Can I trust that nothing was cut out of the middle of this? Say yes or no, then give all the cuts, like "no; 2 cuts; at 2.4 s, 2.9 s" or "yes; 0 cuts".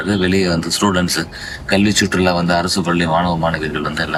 yes; 0 cuts